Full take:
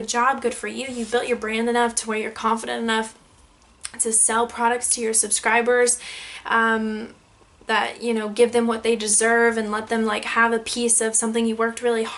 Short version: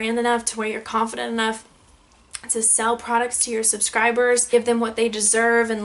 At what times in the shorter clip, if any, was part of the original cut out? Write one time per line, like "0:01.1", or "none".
0:04.5